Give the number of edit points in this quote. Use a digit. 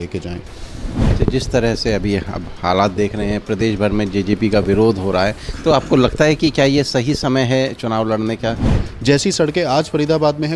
2